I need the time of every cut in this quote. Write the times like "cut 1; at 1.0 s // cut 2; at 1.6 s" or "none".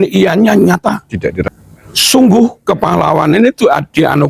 cut 1; at 1.5 s